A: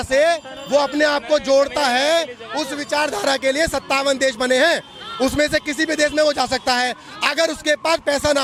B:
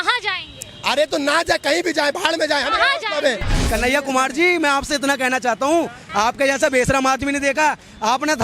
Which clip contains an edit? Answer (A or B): B